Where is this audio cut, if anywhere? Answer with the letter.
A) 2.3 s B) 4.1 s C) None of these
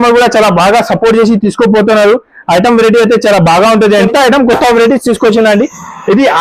B